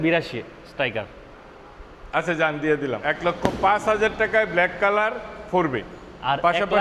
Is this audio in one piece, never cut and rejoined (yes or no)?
no